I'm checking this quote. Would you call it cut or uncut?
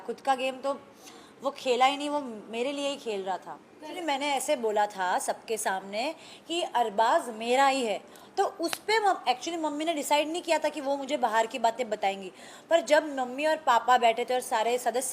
cut